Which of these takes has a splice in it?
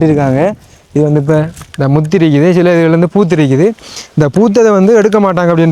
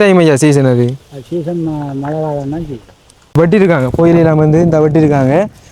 second; 1 cut; at 3.3 s

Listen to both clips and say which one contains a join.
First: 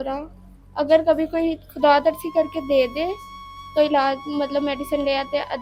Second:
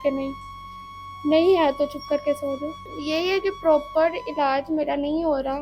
second; 1 cut; at 2.8 s

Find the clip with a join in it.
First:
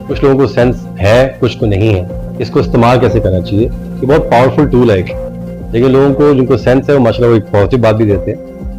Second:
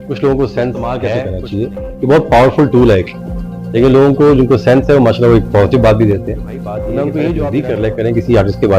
second; 2 cuts; at 1.2 s, 7.5 s

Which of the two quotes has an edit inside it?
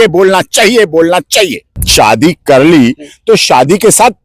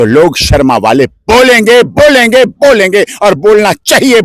first; 1 cut; at 1.6 s

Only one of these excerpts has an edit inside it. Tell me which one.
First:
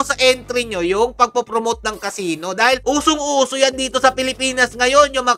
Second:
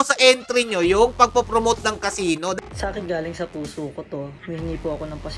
second; 2 cuts; at 2.6 s, 4.4 s

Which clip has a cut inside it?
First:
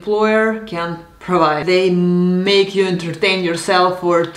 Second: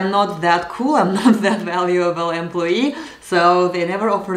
first; 1 cut; at 1.6 s

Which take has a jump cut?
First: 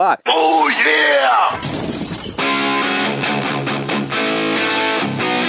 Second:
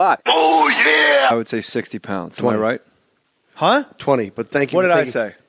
first; 1 cut; at 1.3 s

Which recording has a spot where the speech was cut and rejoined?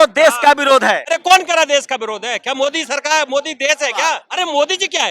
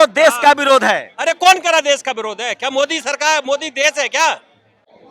first; 2 cuts; at 1.0 s, 4.2 s

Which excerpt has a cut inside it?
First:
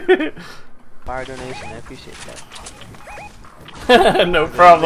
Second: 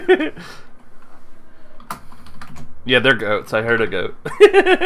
first; 1 cut; at 1.0 s

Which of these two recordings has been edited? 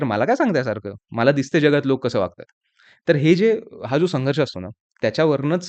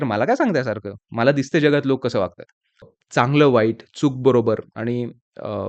second; 1 cut; at 2.9 s

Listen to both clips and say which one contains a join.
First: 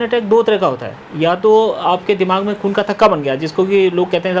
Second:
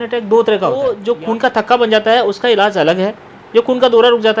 second; 1 cut; at 1.0 s

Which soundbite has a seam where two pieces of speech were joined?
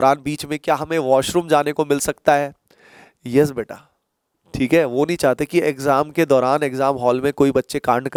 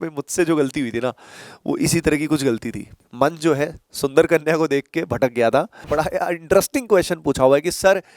second; 2 cuts; at 3.0 s, 5.9 s

